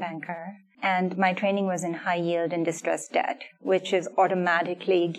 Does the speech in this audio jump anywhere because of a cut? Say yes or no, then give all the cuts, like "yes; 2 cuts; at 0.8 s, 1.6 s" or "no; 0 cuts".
no; 0 cuts